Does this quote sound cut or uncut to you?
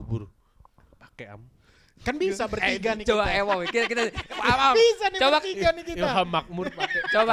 uncut